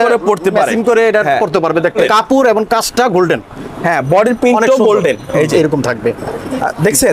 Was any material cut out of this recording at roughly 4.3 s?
no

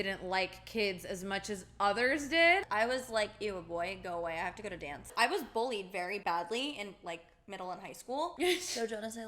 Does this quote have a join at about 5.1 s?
yes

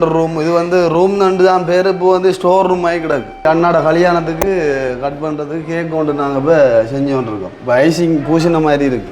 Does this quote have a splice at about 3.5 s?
yes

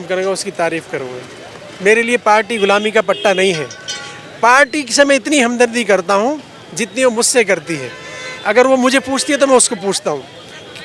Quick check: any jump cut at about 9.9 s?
no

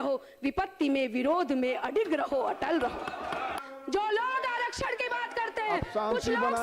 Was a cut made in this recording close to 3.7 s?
yes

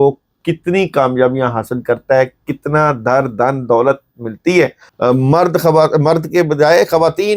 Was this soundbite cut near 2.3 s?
no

